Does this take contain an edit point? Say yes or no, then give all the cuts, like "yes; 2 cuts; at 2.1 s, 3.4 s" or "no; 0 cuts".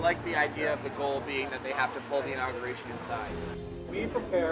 yes; 1 cut; at 3.6 s